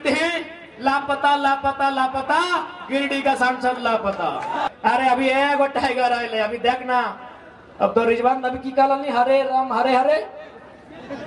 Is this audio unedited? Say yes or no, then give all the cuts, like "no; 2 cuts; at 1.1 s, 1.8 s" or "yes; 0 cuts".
no; 1 cut; at 4.7 s